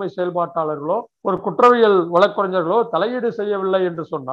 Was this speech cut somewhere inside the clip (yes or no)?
yes